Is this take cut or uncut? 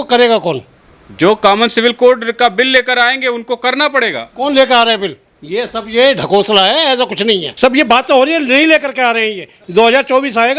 cut